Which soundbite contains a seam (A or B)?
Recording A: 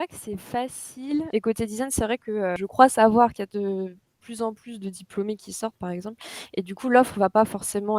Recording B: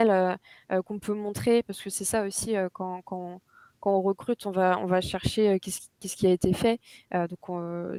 A